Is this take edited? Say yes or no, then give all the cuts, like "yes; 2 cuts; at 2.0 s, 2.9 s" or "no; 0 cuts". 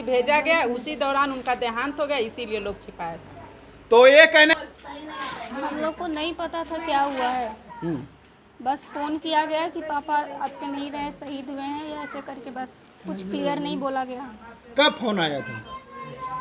no; 0 cuts